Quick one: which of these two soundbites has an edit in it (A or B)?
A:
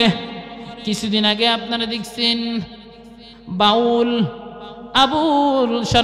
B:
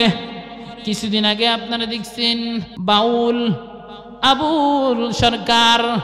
B